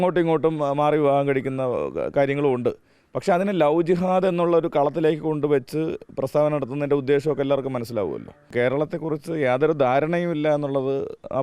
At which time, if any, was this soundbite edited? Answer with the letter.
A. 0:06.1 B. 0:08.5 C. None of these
B